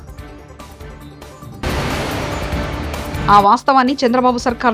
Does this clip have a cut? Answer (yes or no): yes